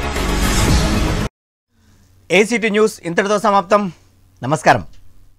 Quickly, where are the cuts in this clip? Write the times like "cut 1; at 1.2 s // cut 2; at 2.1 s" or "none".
none